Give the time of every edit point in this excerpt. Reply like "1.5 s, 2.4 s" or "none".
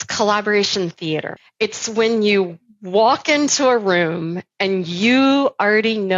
1.4 s